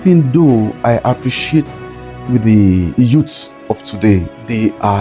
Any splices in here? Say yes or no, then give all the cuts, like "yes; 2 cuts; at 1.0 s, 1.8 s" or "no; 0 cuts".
no; 0 cuts